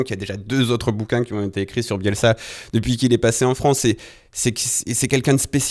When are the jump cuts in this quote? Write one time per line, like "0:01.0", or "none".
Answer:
none